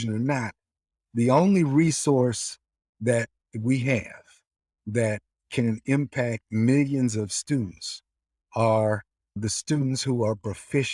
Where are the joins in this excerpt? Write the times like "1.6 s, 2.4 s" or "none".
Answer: 9.4 s